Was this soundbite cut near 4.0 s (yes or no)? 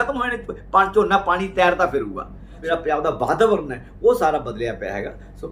no